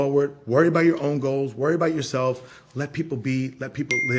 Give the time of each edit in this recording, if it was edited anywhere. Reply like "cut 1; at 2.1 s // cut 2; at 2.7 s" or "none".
none

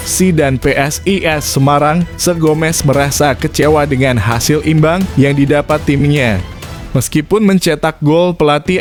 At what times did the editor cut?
none

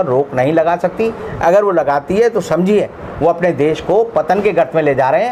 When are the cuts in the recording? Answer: none

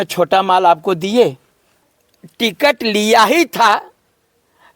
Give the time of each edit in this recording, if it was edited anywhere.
cut 1; at 1.8 s

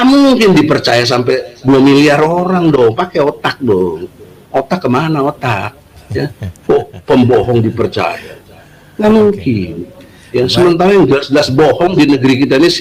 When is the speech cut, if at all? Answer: none

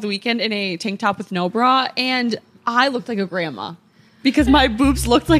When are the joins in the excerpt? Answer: none

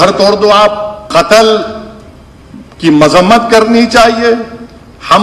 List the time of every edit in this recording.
cut 1; at 0.9 s

